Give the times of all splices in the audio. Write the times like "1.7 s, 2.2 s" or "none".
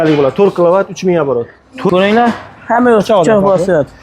1.9 s